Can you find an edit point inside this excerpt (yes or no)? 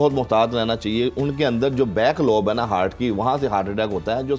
no